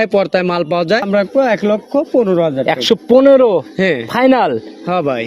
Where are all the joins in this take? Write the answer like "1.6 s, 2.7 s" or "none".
1.1 s

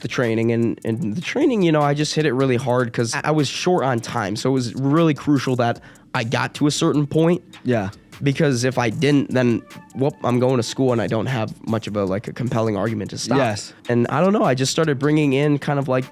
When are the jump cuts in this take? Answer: 3.2 s, 13.8 s

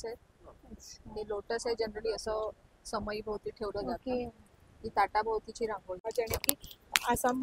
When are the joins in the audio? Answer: 6.0 s

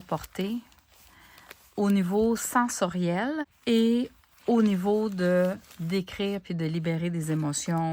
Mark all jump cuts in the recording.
3.5 s

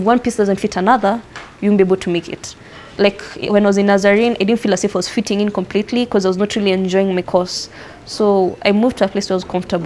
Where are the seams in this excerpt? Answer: none

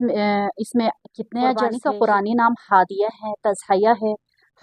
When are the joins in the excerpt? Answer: 1.8 s

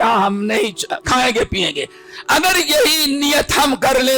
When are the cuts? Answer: 1.0 s

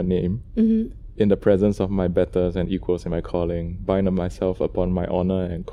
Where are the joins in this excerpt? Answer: none

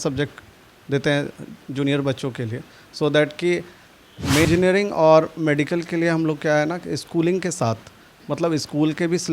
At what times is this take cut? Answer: 4.5 s

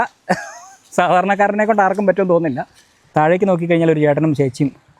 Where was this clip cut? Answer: 3.0 s

